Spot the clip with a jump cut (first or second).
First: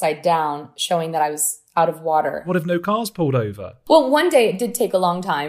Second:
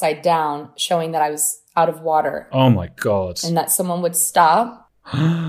first